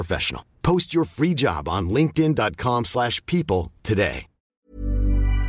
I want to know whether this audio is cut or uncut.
cut